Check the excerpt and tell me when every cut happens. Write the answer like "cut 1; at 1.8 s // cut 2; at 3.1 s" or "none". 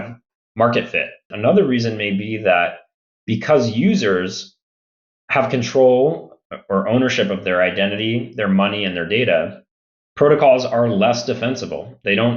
cut 1; at 1.3 s

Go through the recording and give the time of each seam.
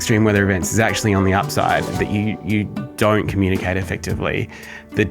none

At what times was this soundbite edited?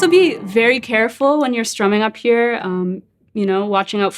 none

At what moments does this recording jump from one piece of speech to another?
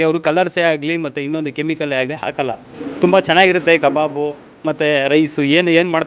none

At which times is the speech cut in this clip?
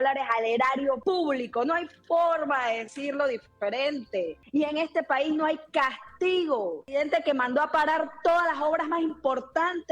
cut 1; at 1.0 s // cut 2; at 4.4 s // cut 3; at 6.8 s

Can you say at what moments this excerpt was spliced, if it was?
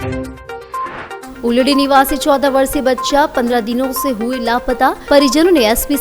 cut 1; at 1.2 s

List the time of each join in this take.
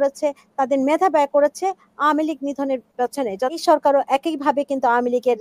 cut 1; at 3.6 s

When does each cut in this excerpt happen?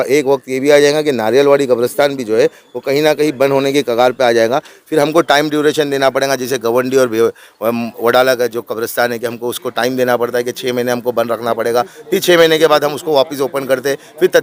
none

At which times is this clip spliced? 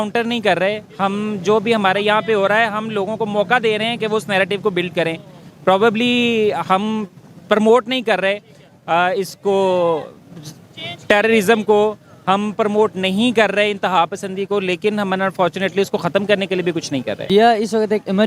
cut 1; at 17.3 s

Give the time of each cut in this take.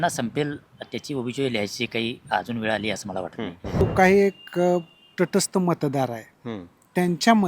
cut 1; at 3.8 s

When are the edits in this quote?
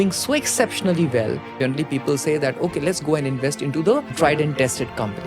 cut 1; at 1.5 s // cut 2; at 4.1 s

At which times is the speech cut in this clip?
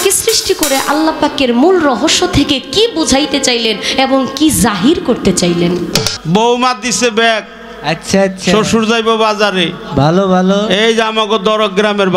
cut 1; at 6.2 s

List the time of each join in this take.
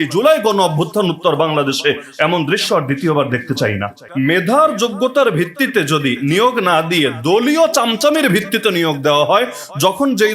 cut 1; at 4.0 s

